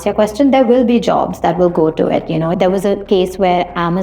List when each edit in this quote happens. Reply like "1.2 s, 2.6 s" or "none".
2.5 s

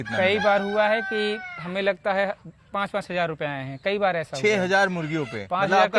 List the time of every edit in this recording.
none

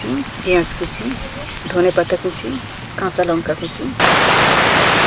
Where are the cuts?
none

